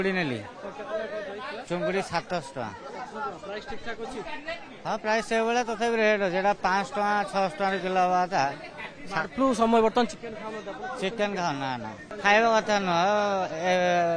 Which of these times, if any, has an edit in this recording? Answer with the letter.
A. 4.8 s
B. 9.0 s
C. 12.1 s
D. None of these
C